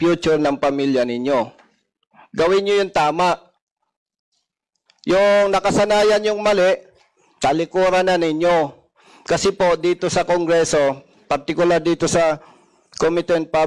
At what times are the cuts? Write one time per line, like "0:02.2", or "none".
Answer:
none

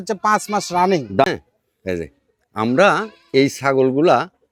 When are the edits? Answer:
0:01.3

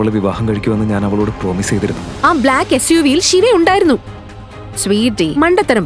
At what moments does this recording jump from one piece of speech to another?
0:02.0

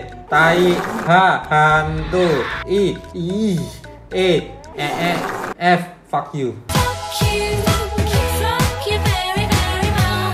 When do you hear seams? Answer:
none

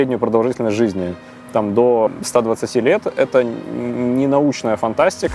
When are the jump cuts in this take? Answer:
0:02.1

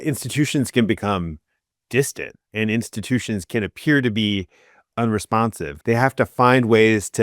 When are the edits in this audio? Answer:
0:05.7

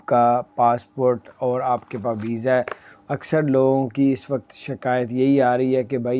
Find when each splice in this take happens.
none

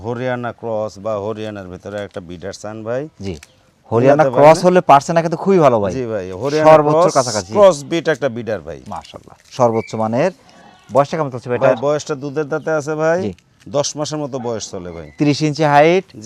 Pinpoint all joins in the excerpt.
none

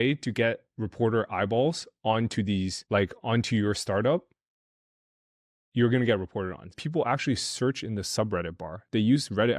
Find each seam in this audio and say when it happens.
0:02.8
0:06.7

